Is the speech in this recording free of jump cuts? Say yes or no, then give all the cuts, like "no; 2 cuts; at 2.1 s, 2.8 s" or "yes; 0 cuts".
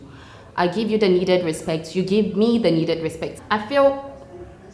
no; 1 cut; at 3.3 s